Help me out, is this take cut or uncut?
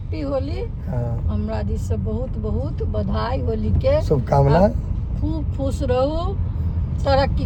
uncut